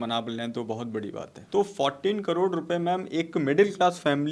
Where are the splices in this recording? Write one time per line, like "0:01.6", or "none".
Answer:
0:01.3